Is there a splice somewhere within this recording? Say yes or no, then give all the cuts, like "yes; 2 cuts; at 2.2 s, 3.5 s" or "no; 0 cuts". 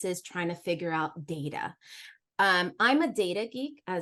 no; 0 cuts